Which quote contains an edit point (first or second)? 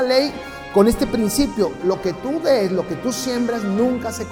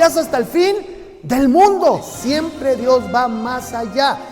second